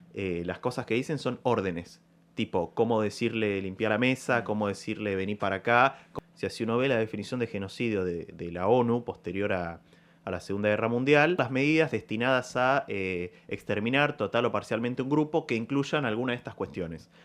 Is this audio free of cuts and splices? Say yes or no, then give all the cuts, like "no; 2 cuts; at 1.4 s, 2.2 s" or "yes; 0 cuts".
no; 2 cuts; at 6.0 s, 11.4 s